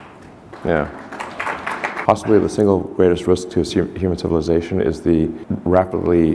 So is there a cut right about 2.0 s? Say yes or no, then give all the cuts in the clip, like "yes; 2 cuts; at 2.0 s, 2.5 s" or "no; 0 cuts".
yes; 1 cut; at 2.0 s